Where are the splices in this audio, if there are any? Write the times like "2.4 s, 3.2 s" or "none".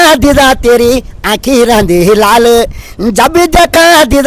none